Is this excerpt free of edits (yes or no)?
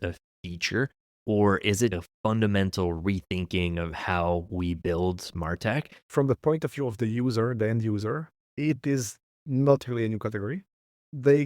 no